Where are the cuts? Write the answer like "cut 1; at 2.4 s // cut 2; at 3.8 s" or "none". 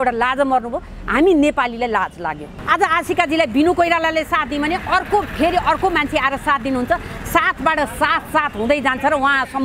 cut 1; at 2.5 s